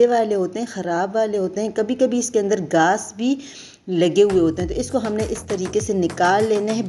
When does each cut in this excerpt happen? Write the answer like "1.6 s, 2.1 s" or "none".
none